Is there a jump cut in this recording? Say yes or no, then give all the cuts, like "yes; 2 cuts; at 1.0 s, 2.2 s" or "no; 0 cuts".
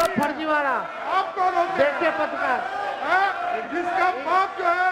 no; 0 cuts